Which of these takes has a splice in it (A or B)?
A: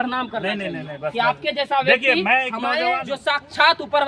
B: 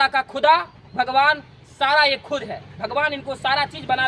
A